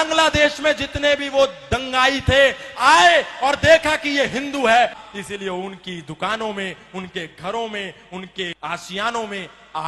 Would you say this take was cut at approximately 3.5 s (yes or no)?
no